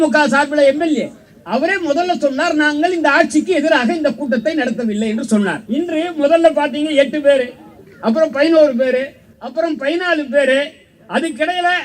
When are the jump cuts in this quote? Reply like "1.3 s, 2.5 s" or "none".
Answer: 5.6 s